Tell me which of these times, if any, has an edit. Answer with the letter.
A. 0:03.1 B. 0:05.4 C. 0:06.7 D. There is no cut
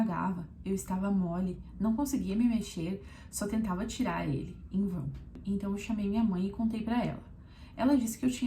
B